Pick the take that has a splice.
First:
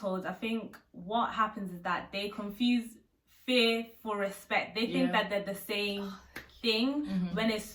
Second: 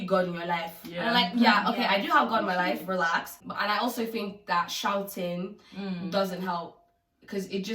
second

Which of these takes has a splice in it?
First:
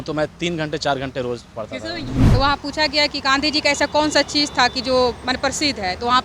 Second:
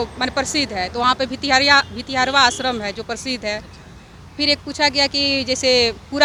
first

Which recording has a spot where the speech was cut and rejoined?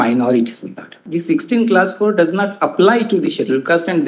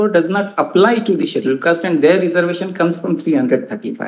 first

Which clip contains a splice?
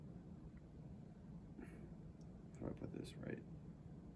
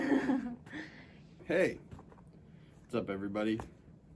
second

